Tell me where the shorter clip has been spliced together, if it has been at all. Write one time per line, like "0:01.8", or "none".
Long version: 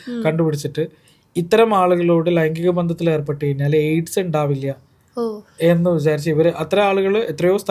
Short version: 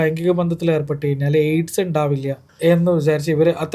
0:02.5